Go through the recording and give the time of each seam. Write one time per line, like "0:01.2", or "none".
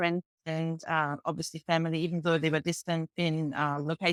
none